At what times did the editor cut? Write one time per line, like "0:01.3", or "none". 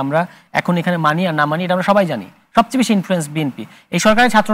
none